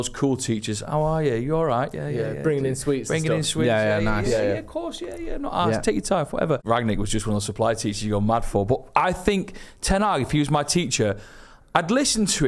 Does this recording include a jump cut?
yes; 1 cut; at 6.6 s

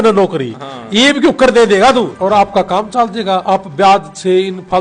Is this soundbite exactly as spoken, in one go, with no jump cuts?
no; 1 cut; at 2.1 s

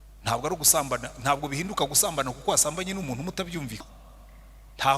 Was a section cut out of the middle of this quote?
yes; 1 cut; at 3.9 s

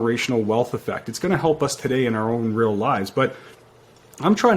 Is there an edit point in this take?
no; 0 cuts

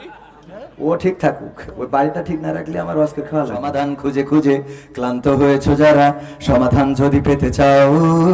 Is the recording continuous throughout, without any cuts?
no; 1 cut; at 3.7 s

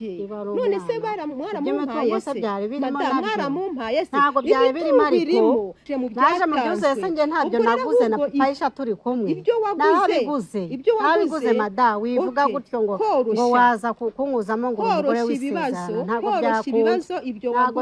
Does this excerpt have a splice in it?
yes; 1 cut; at 5.8 s

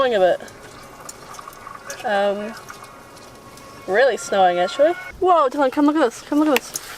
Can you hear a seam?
yes; 1 cut; at 5.1 s

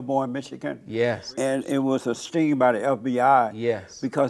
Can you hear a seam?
yes; 2 cuts; at 1.3 s, 2.2 s

